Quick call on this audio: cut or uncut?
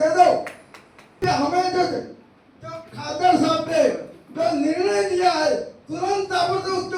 uncut